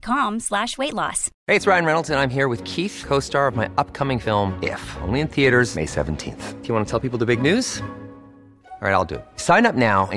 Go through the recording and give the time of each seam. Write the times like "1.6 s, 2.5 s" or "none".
1.3 s